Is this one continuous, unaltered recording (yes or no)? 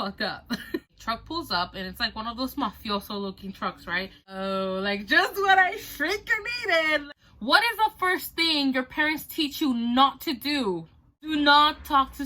no